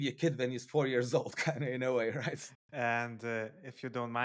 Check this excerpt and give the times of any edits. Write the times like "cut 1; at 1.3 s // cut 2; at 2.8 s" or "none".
cut 1; at 2.4 s